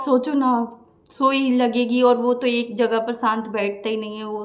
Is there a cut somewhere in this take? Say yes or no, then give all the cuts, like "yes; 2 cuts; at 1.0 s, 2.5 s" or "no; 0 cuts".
no; 0 cuts